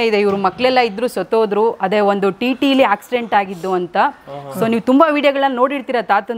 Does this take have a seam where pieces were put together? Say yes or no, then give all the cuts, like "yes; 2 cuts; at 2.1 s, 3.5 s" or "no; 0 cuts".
no; 0 cuts